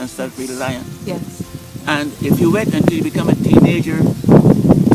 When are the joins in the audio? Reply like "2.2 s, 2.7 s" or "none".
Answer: none